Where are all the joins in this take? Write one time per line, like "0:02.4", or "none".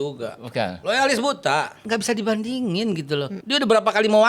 0:01.8
0:03.4

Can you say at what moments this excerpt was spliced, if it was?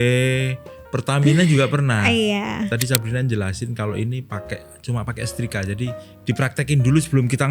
0:02.7
0:06.1

